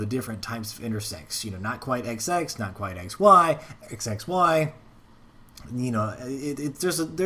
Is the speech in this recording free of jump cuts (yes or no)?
yes